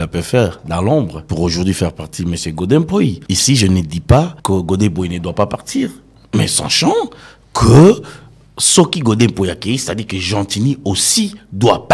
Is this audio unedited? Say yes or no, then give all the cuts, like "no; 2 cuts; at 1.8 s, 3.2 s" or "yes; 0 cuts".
no; 3 cuts; at 1.2 s, 3.3 s, 4.4 s